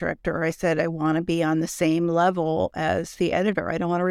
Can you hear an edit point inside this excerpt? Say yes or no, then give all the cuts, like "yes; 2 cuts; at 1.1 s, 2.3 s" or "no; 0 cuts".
no; 0 cuts